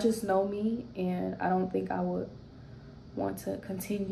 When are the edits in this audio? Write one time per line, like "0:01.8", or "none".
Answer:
none